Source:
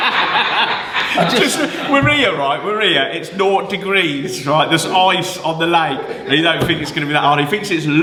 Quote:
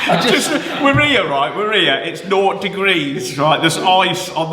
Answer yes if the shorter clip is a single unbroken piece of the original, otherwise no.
yes